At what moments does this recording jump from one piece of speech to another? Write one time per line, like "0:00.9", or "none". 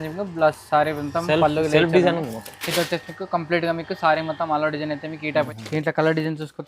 0:05.5